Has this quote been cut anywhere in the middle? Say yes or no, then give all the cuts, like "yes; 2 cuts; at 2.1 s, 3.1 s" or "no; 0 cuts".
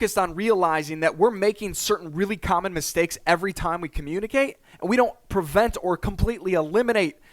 yes; 1 cut; at 4.7 s